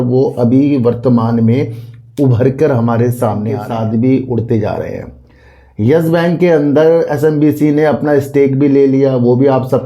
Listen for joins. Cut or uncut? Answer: cut